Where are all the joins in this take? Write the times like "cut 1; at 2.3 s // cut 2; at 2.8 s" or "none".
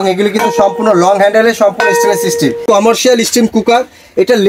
cut 1; at 2.6 s